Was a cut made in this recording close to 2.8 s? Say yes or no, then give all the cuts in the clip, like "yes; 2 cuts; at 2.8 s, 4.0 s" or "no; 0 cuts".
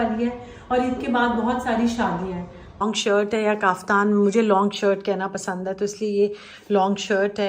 yes; 1 cut; at 2.8 s